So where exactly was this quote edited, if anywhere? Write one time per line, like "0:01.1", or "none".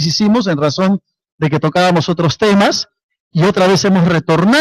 0:01.2